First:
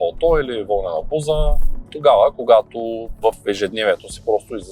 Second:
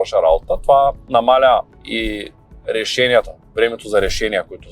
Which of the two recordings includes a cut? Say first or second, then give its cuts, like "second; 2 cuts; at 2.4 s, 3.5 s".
second; 2 cuts; at 1.0 s, 1.8 s